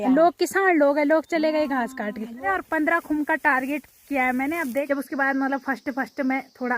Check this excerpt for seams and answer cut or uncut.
cut